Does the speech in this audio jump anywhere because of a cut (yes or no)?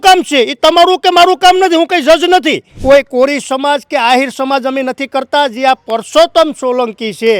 yes